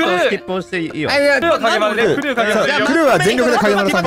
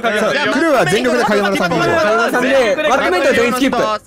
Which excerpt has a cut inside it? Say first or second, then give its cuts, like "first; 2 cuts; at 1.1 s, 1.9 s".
first; 1 cut; at 1.4 s